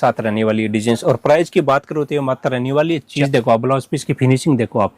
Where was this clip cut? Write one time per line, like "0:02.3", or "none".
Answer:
0:03.1